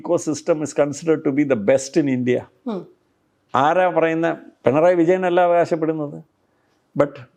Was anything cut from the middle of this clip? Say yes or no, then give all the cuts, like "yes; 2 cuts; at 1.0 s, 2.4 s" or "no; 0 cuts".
no; 0 cuts